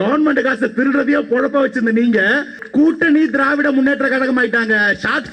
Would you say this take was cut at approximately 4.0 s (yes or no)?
no